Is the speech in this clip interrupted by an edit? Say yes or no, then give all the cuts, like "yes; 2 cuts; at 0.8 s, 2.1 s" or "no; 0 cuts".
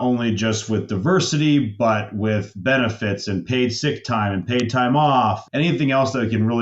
yes; 1 cut; at 5.4 s